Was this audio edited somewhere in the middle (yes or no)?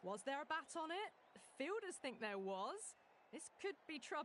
no